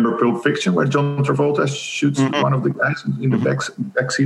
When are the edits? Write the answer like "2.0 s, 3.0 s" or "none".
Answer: none